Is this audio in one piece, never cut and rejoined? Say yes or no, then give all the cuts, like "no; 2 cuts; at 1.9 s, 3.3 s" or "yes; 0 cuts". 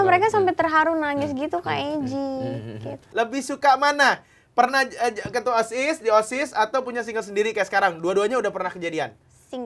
no; 1 cut; at 3.1 s